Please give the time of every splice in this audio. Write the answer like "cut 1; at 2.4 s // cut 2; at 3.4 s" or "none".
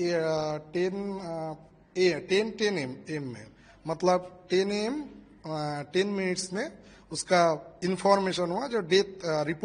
none